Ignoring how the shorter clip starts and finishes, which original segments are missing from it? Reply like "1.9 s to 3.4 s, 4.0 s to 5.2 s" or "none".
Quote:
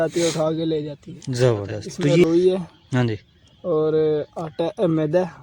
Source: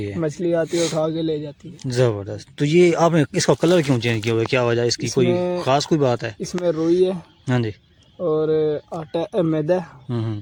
2.8 s to 6.8 s

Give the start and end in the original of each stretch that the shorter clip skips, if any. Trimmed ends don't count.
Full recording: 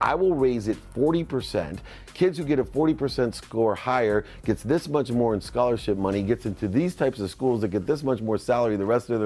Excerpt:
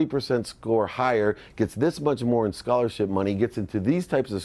none

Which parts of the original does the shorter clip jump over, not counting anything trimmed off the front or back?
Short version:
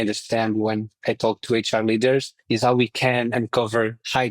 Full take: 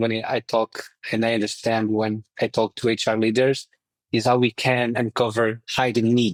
3.7 s to 4.0 s

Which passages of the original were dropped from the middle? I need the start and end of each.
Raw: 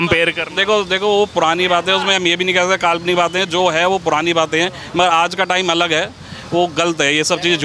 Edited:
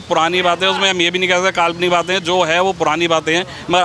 none

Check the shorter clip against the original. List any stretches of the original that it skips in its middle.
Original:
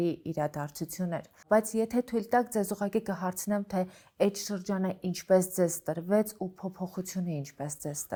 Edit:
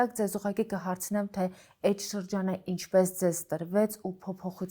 none

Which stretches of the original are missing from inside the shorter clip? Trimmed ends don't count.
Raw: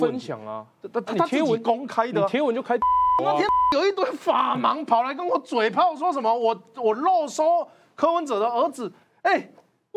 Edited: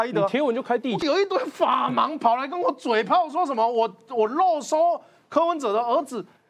2.9 s to 3.6 s

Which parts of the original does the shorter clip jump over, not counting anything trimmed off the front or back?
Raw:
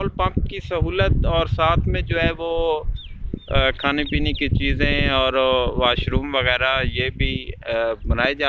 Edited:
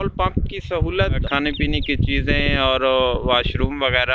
1.2 s to 3.8 s

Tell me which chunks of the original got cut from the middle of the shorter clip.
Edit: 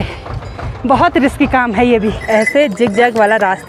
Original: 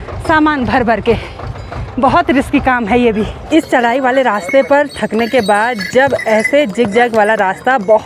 3.4 s to 6.2 s

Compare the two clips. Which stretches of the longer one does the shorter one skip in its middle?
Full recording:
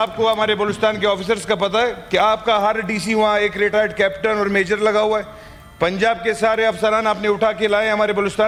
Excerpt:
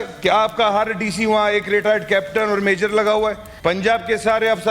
5.3 s to 5.6 s

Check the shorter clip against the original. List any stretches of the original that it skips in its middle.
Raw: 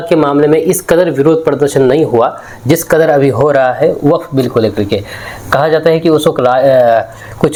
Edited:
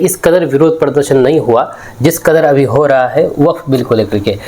none

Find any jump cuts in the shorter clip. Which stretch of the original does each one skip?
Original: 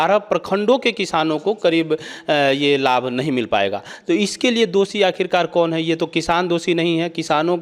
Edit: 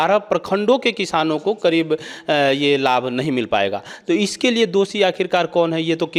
none

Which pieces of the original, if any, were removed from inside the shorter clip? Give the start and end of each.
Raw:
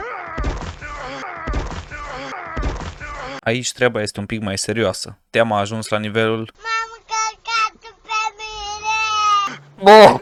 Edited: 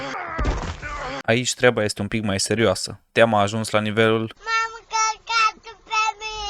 2.3 s to 3.4 s

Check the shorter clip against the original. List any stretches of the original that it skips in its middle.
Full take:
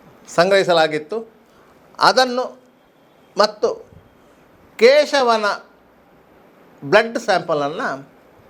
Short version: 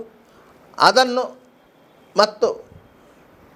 none

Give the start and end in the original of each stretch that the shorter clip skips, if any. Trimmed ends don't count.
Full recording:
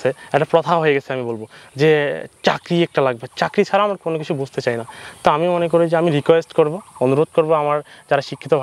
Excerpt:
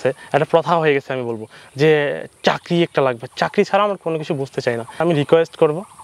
5.0 s to 6.0 s

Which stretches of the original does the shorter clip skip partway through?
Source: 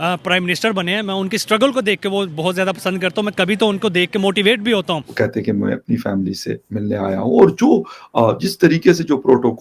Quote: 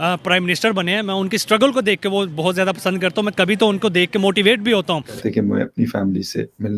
5.2 s to 5.3 s

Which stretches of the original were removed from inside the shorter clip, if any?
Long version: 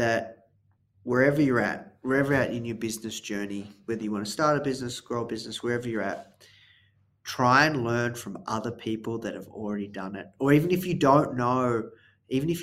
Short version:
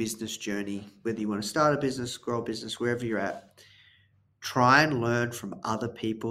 none

